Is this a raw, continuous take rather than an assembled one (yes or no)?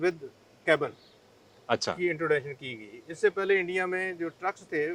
yes